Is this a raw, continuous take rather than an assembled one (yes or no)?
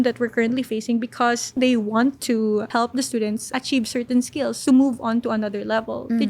no